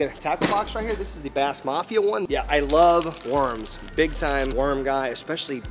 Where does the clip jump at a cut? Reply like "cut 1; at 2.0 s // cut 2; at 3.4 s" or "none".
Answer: cut 1; at 2.3 s